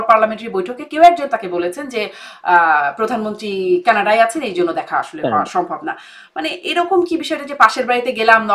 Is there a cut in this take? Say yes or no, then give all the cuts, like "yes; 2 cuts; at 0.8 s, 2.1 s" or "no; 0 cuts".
no; 0 cuts